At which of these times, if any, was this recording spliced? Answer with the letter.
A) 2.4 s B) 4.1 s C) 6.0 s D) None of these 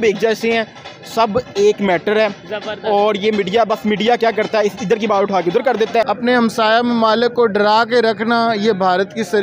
C